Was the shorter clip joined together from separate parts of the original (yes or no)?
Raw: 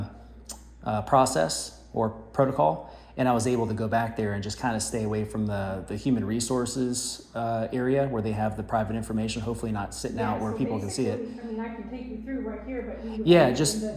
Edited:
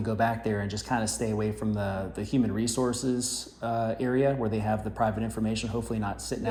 no